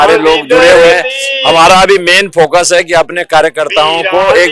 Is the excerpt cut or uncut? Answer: uncut